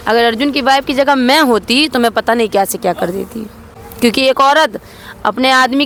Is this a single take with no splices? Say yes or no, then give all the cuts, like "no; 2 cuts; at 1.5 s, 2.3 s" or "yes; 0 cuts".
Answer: yes; 0 cuts